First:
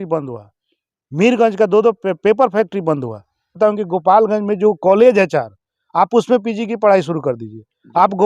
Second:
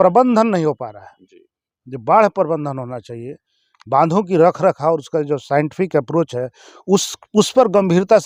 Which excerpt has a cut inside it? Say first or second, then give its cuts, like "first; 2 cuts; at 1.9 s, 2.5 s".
first; 1 cut; at 3.6 s